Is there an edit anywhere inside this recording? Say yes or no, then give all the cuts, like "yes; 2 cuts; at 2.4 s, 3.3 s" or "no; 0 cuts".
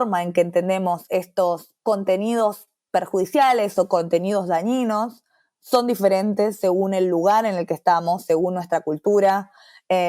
yes; 1 cut; at 1.7 s